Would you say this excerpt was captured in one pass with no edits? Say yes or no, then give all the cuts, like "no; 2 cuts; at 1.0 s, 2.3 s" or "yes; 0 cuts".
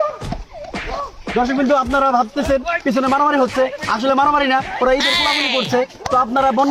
yes; 0 cuts